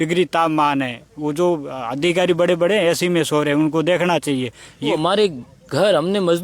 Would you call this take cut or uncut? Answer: cut